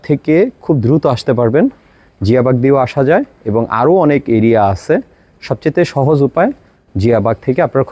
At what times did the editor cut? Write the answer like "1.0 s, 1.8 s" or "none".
none